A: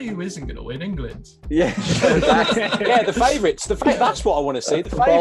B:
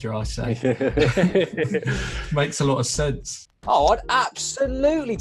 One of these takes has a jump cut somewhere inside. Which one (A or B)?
B